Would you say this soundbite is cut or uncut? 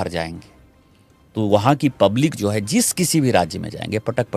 uncut